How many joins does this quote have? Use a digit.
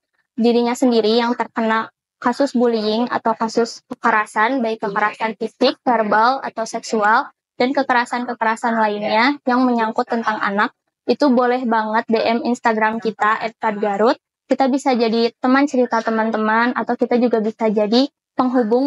0